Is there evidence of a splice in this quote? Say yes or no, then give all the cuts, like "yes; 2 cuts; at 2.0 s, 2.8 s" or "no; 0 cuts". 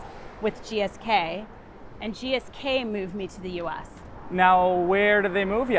no; 0 cuts